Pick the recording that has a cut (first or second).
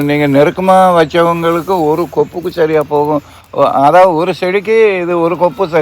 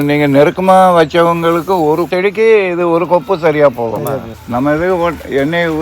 second